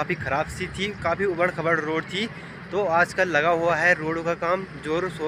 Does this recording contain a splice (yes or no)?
no